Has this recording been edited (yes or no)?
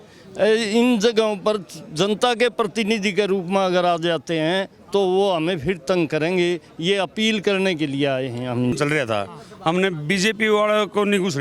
yes